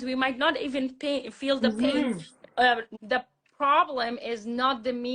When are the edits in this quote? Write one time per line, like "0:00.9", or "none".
0:02.9